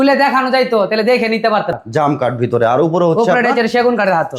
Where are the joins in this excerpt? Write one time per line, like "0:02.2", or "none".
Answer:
0:01.8